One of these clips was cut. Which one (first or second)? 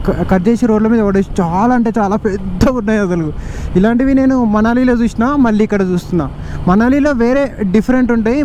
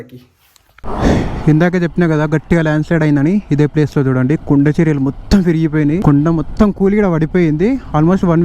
second